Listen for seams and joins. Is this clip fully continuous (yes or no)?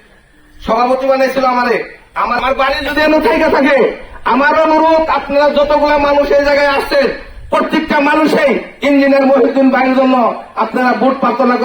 no